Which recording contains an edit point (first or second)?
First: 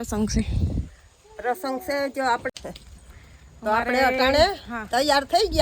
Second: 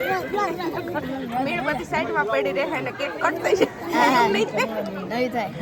first